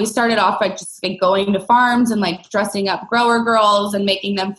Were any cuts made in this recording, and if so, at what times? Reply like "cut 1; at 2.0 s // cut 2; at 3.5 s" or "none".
none